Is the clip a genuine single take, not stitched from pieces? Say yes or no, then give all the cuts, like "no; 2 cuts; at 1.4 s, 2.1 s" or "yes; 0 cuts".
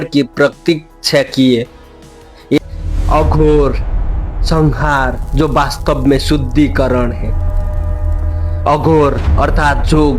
no; 1 cut; at 2.6 s